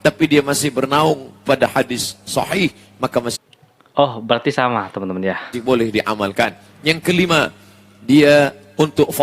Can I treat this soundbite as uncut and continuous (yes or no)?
yes